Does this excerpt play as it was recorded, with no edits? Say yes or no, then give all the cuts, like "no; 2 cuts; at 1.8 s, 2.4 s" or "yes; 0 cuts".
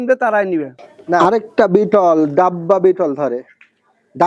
no; 1 cut; at 1.2 s